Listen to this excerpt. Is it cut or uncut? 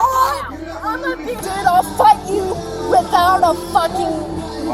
cut